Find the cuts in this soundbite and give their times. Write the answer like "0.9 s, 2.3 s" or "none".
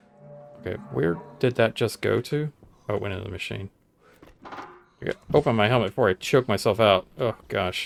none

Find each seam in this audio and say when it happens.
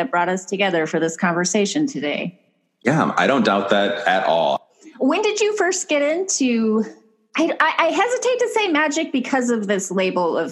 4.6 s

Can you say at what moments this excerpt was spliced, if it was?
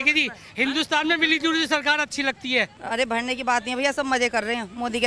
2.8 s

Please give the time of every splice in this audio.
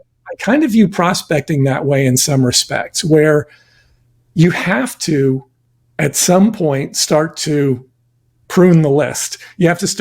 none

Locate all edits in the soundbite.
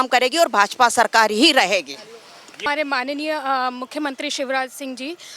2.6 s

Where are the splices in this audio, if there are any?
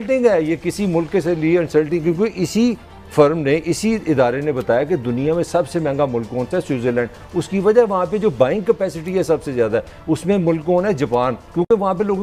none

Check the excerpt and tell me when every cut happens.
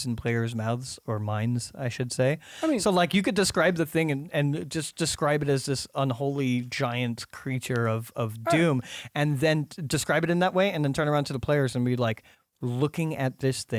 none

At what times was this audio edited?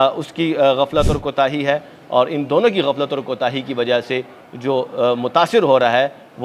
none

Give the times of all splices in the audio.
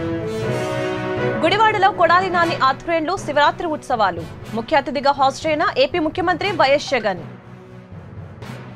none

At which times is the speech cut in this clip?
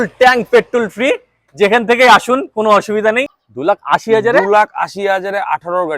3.3 s

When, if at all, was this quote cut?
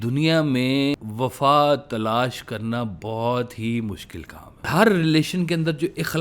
1.0 s, 4.7 s

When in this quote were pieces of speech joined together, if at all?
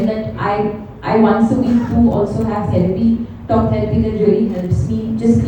none

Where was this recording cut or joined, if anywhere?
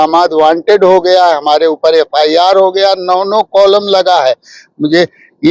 none

